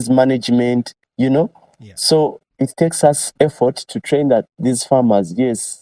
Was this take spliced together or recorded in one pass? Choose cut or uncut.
uncut